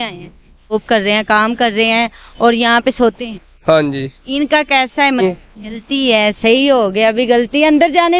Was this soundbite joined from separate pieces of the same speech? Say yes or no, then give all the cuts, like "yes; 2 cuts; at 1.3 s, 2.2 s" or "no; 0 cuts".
yes; 2 cuts; at 0.7 s, 5.2 s